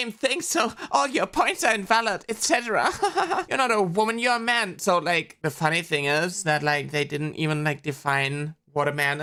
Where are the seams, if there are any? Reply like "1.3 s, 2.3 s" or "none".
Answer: none